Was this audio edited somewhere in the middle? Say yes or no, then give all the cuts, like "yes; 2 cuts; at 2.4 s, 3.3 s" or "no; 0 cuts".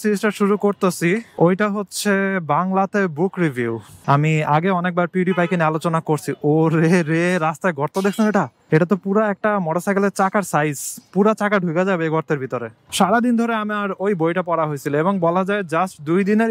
yes; 2 cuts; at 3.9 s, 12.8 s